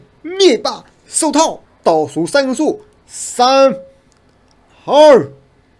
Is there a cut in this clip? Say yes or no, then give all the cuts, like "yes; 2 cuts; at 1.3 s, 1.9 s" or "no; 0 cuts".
yes; 1 cut; at 1.7 s